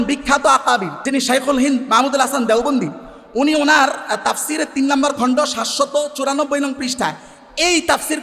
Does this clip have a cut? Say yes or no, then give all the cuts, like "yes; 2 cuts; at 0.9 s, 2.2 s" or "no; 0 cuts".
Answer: yes; 1 cut; at 0.9 s